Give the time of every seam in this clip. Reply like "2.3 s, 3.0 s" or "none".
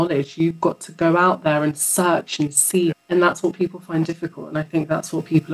3.0 s